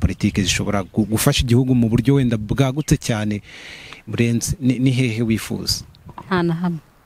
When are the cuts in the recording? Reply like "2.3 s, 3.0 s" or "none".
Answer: none